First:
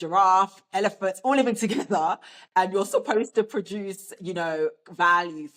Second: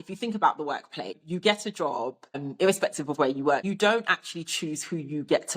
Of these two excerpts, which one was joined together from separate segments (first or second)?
second